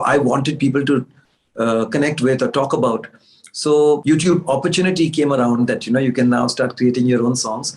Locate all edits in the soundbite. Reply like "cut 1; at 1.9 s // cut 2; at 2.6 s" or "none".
cut 1; at 4.0 s